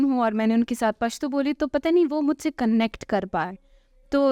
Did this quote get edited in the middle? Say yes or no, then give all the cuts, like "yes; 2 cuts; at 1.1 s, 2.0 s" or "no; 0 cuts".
no; 0 cuts